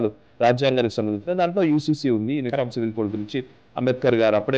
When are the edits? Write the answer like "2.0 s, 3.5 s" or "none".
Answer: none